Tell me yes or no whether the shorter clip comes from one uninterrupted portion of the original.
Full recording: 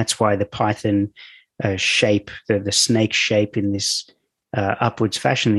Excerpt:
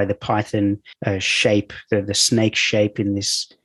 no